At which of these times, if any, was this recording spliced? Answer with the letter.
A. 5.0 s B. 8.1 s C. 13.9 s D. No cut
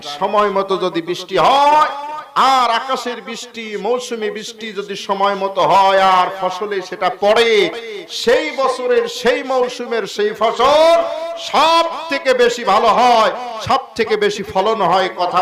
D